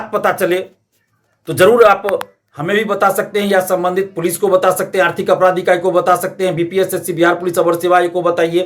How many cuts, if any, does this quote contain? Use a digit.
0